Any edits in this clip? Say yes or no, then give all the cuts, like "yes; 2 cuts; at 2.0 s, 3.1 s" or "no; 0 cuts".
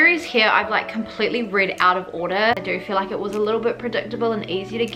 yes; 1 cut; at 2.6 s